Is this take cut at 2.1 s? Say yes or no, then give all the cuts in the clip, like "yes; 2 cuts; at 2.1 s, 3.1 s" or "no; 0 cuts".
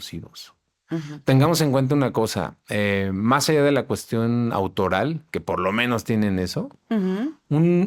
no; 0 cuts